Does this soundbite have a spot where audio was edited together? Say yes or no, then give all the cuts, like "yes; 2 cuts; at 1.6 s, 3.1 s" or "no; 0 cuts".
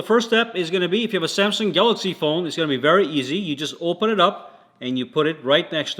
no; 0 cuts